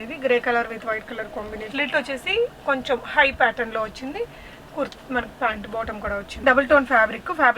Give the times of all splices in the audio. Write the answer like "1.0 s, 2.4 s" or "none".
1.6 s, 6.4 s